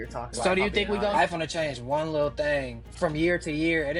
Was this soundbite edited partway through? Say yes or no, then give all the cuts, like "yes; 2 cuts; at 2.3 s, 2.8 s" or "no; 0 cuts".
yes; 2 cuts; at 1.1 s, 2.8 s